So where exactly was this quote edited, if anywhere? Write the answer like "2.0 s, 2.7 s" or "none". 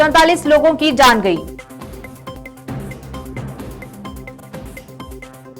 2.4 s, 4.4 s